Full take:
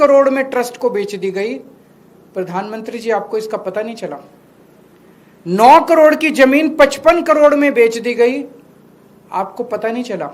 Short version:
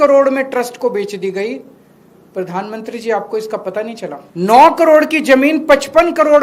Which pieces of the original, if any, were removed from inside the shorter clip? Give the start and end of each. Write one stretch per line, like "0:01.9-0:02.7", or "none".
0:04.2-0:05.3